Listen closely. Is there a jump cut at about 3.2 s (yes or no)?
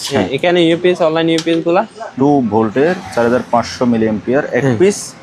no